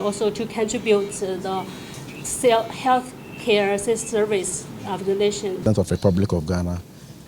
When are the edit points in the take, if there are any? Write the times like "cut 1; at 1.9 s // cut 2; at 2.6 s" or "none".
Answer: cut 1; at 5.6 s